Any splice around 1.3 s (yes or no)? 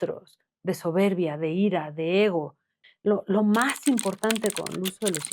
no